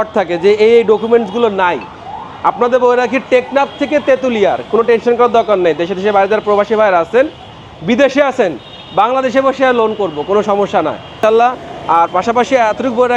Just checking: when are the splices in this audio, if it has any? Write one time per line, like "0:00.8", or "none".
0:11.1